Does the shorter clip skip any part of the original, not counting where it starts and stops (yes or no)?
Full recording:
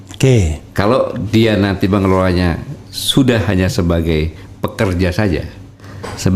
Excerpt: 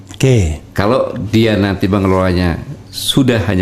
no